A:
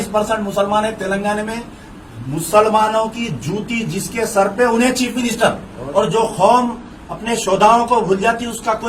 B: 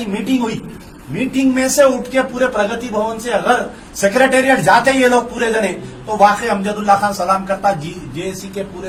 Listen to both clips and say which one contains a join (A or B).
A